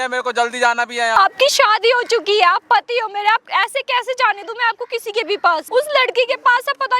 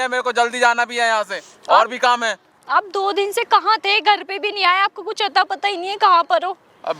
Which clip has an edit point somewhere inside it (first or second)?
first